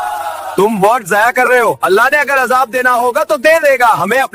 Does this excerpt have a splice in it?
no; 0 cuts

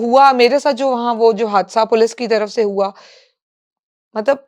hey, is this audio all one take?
yes; 0 cuts

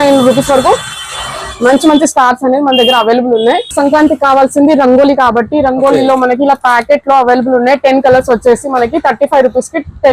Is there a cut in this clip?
yes; 1 cut; at 3.7 s

